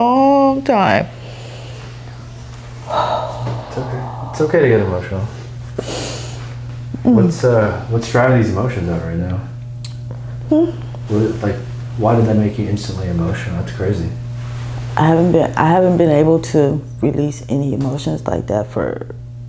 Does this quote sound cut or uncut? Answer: uncut